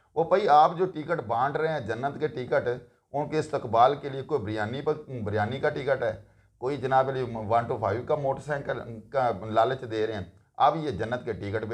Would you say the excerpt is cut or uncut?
uncut